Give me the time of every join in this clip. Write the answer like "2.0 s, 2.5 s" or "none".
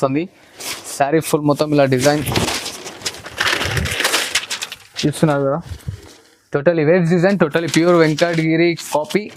none